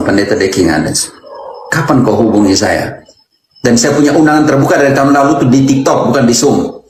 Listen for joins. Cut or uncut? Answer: uncut